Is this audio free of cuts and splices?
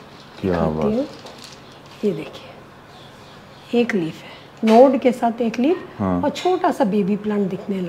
yes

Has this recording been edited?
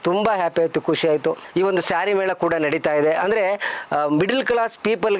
no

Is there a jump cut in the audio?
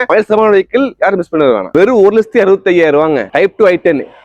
no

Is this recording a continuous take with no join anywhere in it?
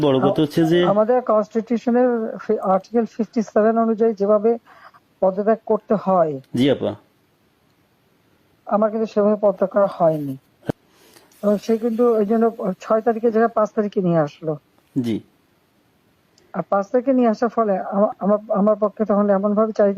no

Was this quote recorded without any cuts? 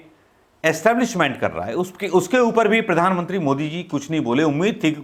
yes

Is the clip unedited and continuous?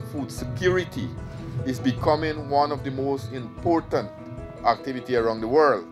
no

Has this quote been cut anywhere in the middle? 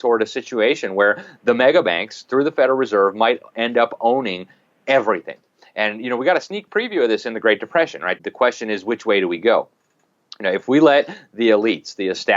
yes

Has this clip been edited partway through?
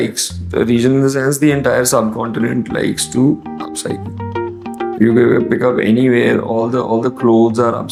no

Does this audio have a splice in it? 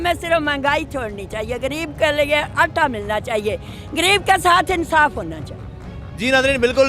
no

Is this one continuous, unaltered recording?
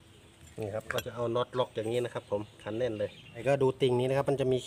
no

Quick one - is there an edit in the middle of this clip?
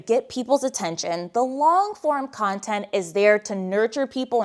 no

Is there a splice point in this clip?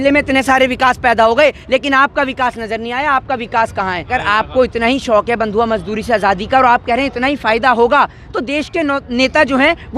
yes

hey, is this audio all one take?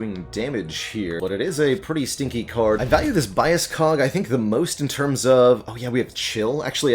no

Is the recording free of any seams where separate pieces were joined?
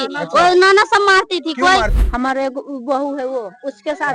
no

